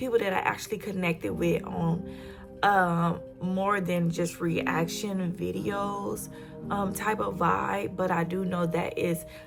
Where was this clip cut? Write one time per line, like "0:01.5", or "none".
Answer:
none